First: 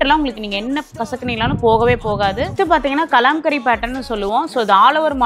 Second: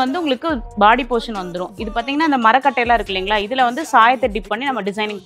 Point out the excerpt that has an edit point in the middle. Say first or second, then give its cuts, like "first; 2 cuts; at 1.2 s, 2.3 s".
first; 1 cut; at 2.5 s